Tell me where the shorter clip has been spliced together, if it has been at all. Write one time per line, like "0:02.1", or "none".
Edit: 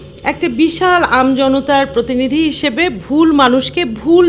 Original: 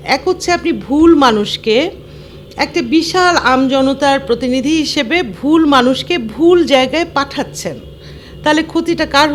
none